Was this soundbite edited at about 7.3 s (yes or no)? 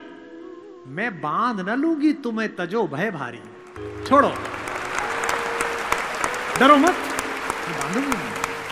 no